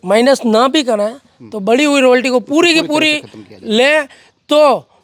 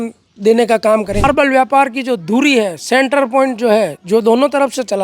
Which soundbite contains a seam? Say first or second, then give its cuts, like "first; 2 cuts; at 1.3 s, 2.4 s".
second; 1 cut; at 1.2 s